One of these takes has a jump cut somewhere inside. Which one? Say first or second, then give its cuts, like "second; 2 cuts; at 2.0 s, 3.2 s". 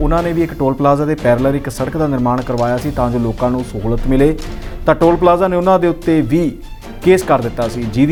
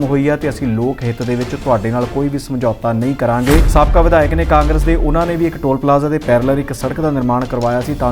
second; 1 cut; at 3.7 s